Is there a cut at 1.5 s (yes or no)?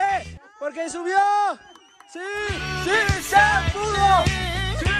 no